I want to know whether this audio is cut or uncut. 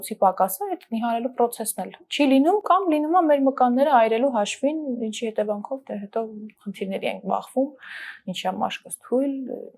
uncut